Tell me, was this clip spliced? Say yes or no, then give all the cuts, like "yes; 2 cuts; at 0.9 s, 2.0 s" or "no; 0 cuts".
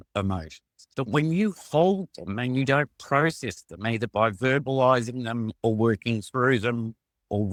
no; 0 cuts